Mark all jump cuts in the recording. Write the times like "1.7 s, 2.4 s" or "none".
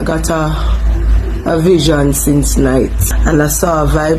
3.1 s